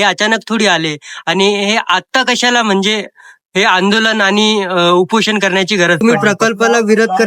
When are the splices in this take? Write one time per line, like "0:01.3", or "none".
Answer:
0:06.0